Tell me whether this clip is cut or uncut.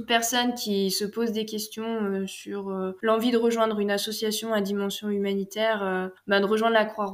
uncut